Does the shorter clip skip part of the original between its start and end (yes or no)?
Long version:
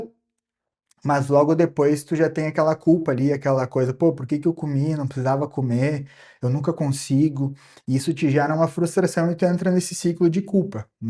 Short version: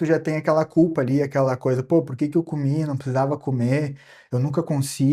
no